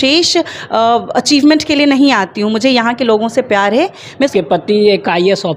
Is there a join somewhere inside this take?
yes; 1 cut; at 4.3 s

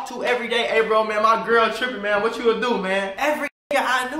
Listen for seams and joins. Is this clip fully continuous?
no; 1 cut; at 3.1 s

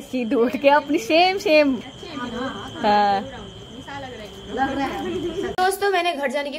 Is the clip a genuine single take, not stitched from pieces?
no; 2 cuts; at 1.8 s, 5.5 s

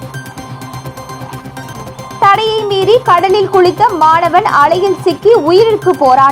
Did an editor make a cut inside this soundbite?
yes; 1 cut; at 1.8 s

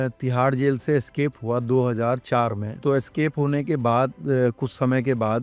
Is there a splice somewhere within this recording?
no; 0 cuts

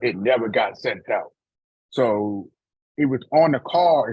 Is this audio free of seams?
yes; 0 cuts

